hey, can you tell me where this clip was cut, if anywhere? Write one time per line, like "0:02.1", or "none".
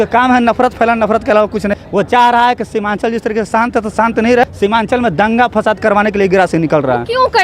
0:01.8
0:04.4